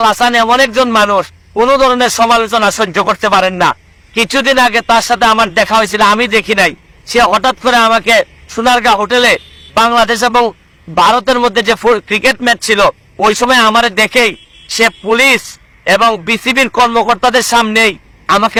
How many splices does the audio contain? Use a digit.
0